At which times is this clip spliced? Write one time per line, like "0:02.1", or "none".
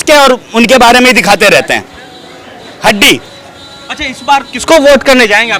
none